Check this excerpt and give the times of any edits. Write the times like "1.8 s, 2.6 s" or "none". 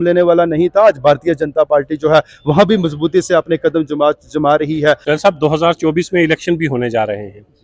5.0 s